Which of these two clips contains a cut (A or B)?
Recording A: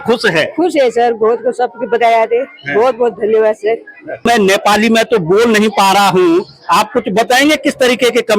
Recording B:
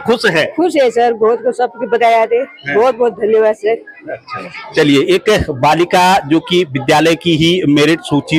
A